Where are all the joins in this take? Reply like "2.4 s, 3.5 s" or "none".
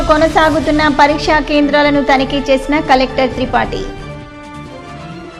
none

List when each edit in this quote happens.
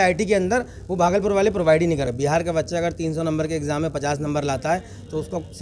2.1 s

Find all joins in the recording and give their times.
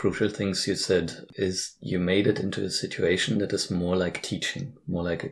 1.2 s

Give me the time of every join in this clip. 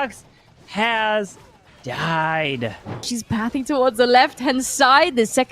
3.2 s

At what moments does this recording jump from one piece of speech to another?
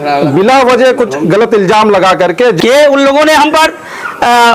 2.6 s

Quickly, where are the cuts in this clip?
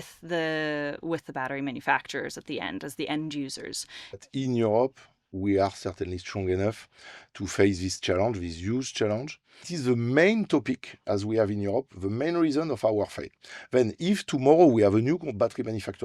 4.2 s, 9.7 s

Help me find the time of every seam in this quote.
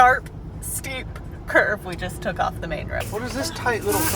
3.0 s

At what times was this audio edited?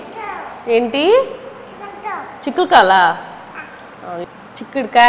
none

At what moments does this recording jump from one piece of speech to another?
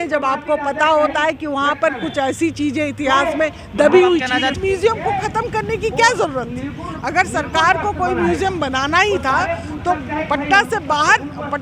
4.5 s

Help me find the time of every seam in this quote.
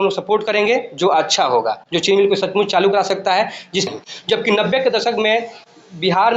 3.9 s

